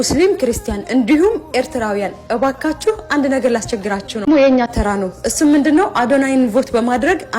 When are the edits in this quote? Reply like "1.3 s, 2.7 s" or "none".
4.2 s

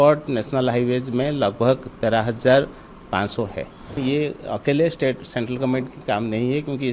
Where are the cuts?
4.0 s

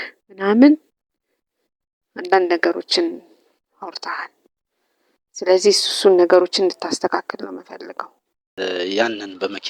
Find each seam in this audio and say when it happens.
8.5 s

